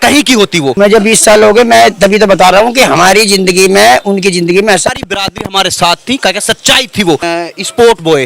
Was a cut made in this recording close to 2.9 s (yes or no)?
no